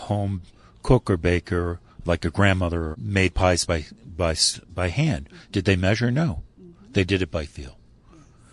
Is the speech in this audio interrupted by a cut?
yes; 1 cut; at 3.0 s

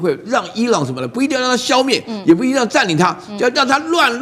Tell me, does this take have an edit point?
no; 0 cuts

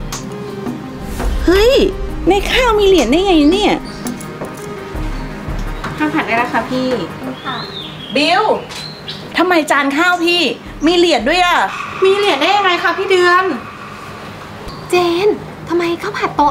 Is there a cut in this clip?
no; 0 cuts

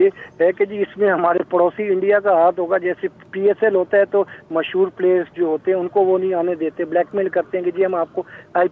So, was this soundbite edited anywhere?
no; 0 cuts

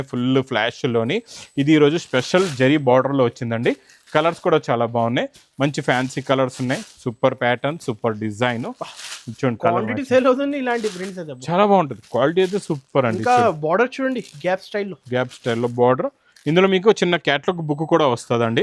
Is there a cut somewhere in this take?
no; 0 cuts

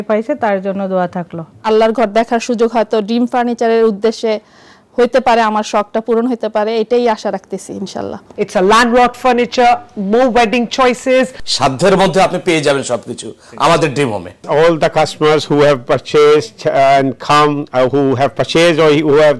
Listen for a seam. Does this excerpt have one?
yes; 4 cuts; at 1.6 s, 8.2 s, 11.4 s, 14.4 s

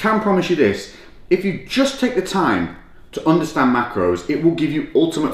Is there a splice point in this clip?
no; 0 cuts

